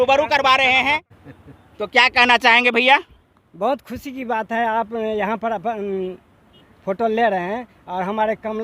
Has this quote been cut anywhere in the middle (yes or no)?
no